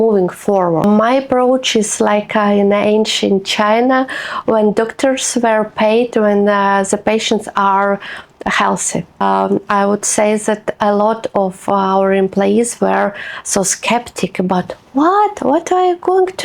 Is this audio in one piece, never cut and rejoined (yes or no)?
no